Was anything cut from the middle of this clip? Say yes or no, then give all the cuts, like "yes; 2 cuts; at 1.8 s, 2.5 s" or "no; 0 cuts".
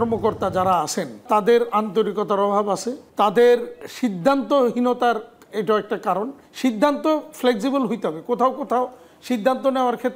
yes; 4 cuts; at 1.2 s, 3.0 s, 3.8 s, 6.4 s